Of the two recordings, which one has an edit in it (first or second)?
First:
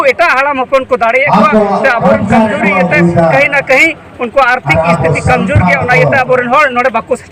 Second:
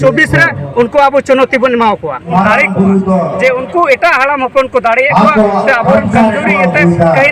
second